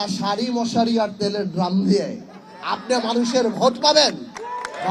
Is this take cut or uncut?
uncut